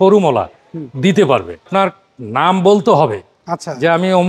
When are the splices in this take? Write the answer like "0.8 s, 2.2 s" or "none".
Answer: 1.7 s